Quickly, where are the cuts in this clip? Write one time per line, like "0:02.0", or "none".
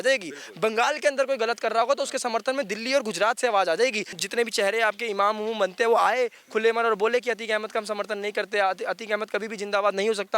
0:04.1